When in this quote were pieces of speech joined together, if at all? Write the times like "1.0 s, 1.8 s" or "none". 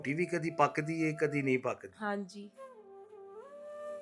2.6 s